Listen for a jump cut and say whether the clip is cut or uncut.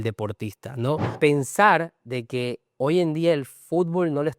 cut